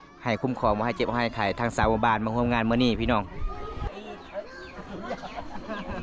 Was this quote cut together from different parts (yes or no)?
yes